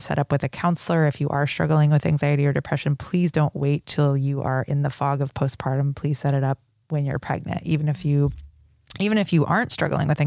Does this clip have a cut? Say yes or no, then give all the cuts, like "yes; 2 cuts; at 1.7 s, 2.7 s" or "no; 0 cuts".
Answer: no; 0 cuts